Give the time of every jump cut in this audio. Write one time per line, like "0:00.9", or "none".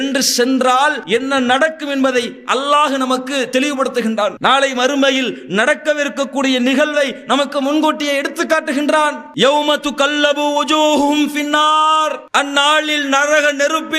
0:01.0
0:12.2